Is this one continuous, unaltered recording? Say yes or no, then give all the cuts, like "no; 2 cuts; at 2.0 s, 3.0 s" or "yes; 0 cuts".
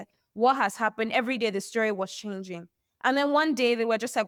yes; 0 cuts